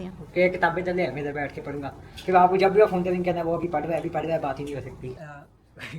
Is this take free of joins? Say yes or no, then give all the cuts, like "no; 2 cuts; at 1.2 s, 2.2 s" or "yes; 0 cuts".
no; 1 cut; at 5.1 s